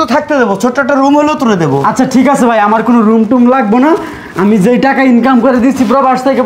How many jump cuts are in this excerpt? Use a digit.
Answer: 0